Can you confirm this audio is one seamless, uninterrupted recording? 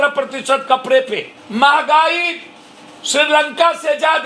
yes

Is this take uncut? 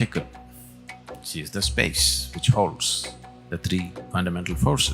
no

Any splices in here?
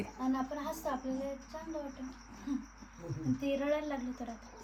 no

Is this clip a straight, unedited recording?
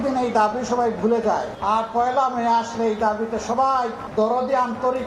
no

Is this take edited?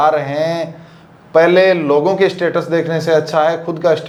no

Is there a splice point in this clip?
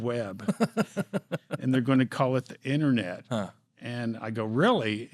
no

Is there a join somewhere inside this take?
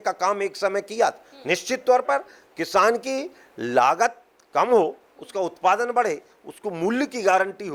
no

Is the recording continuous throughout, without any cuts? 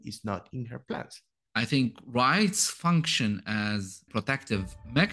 no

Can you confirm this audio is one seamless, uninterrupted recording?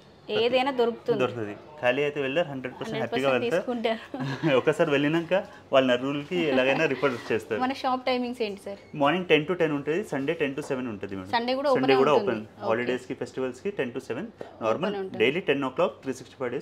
yes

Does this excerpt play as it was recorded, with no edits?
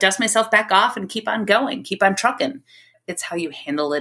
no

